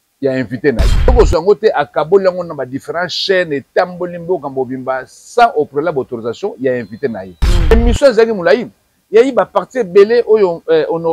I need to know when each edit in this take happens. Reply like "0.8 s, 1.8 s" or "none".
1.1 s, 7.7 s